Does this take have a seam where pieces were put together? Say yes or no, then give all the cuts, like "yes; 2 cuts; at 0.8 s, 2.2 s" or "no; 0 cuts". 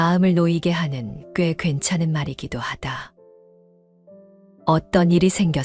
no; 0 cuts